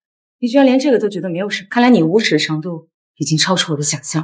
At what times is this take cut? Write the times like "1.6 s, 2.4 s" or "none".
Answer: 1.5 s

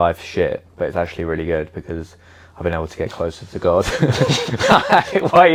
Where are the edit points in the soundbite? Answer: none

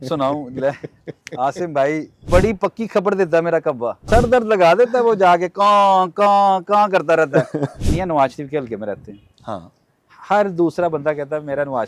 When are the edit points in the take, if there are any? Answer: 2.3 s, 7.8 s

